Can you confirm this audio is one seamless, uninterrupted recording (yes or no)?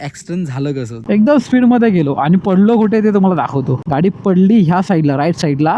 no